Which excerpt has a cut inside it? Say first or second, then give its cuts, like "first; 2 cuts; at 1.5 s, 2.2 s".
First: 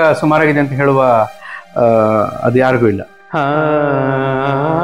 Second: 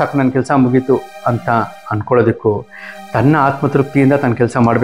first; 1 cut; at 3.1 s